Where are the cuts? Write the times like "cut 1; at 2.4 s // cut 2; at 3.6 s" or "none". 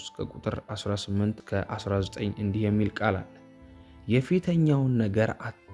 cut 1; at 1.4 s